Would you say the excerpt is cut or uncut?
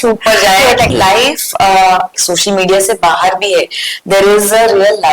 cut